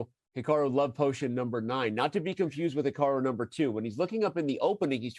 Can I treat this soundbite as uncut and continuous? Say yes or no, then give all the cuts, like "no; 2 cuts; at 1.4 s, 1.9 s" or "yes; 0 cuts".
yes; 0 cuts